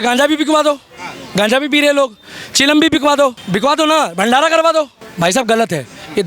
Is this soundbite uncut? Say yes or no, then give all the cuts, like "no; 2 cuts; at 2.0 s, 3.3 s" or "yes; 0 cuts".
no; 2 cuts; at 3.4 s, 5.0 s